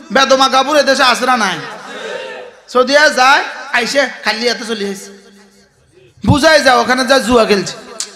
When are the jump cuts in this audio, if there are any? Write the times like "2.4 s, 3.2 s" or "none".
none